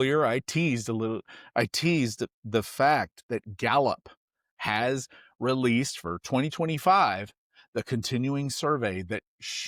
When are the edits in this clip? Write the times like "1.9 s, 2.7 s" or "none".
none